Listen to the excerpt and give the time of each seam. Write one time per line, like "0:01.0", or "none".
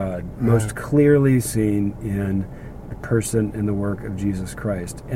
none